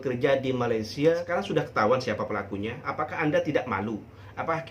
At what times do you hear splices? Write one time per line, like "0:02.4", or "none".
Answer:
0:01.2